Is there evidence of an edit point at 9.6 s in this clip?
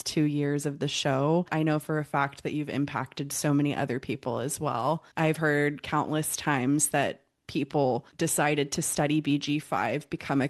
no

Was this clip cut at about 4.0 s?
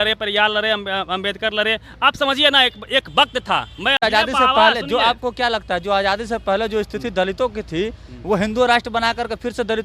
yes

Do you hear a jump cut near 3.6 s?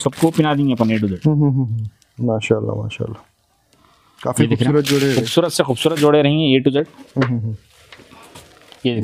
no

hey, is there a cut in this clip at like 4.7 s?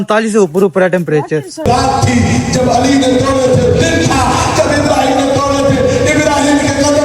no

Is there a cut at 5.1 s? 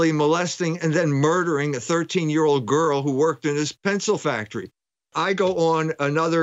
yes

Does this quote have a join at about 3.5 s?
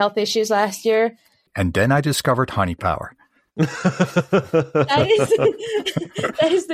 no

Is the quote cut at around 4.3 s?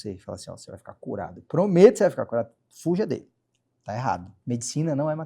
yes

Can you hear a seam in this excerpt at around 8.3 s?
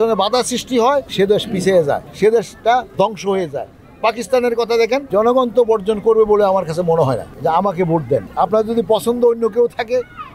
yes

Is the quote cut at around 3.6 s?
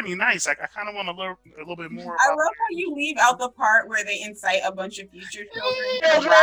no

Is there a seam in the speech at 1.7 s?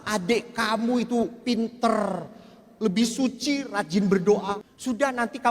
no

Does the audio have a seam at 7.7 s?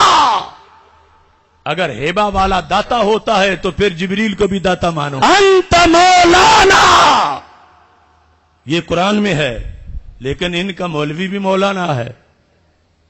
no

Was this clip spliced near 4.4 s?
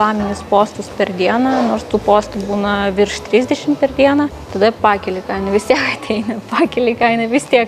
yes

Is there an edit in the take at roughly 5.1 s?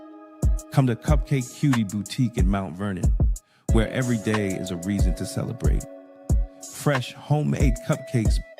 no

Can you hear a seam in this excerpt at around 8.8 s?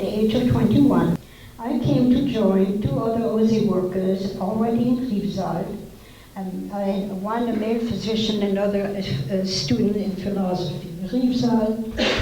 no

